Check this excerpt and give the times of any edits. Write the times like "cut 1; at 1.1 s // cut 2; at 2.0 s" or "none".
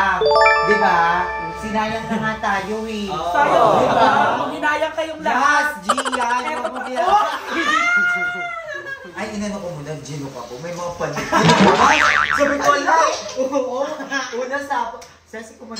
cut 1; at 9.0 s